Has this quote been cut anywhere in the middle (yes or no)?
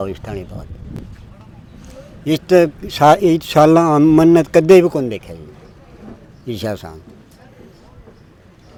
no